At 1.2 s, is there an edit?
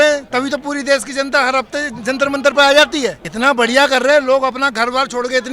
no; 1 cut; at 3.3 s

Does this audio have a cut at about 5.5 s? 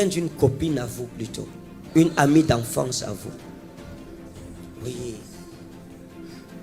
no; 0 cuts

